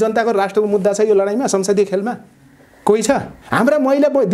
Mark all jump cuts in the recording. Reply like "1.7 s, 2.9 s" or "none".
3.4 s